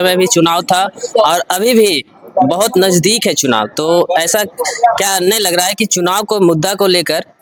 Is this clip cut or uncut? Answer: uncut